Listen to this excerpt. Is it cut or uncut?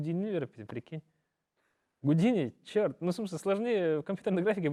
uncut